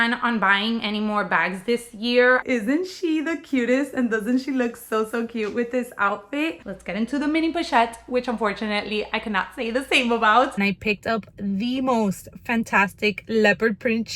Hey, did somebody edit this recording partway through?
yes; 3 cuts; at 2.4 s, 6.7 s, 10.5 s

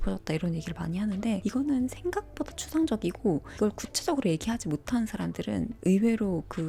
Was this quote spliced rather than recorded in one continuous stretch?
no; 0 cuts

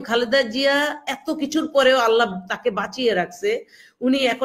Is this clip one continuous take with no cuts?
yes; 0 cuts

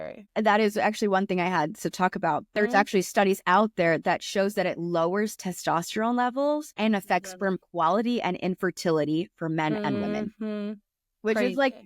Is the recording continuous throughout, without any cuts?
no; 1 cut; at 2.5 s

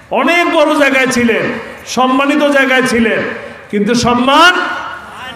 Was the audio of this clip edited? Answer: no; 0 cuts

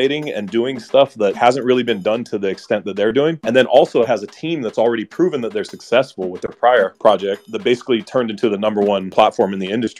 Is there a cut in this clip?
no; 0 cuts

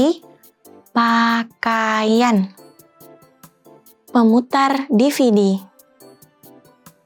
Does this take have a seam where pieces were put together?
no; 0 cuts

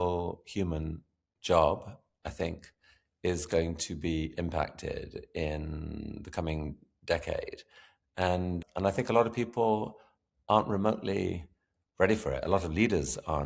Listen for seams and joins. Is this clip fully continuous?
no; 1 cut; at 8.5 s

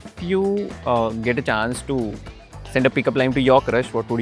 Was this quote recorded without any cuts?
yes; 0 cuts

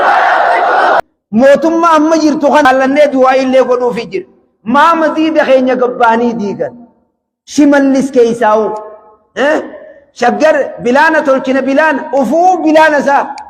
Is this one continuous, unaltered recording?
no; 2 cuts; at 1.0 s, 2.7 s

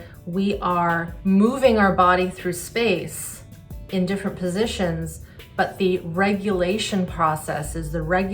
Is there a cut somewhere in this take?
yes; 1 cut; at 1.1 s

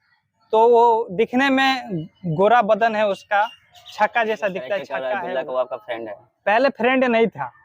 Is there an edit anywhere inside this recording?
yes; 1 cut; at 5.0 s

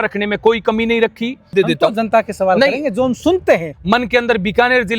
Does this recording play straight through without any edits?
no; 2 cuts; at 1.5 s, 3.8 s

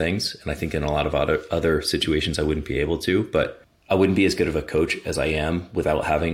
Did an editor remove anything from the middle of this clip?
yes; 1 cut; at 3.7 s

